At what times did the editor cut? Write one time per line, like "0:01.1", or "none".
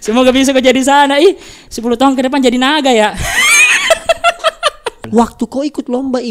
0:05.0